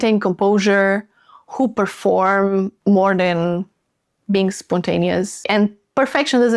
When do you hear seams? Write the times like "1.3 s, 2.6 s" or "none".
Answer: 2.7 s, 5.4 s